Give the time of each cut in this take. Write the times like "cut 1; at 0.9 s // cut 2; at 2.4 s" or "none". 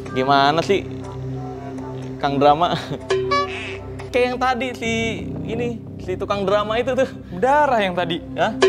cut 1; at 4.0 s